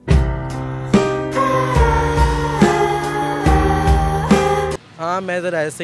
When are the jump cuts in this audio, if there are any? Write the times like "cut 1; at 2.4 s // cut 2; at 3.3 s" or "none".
cut 1; at 4.9 s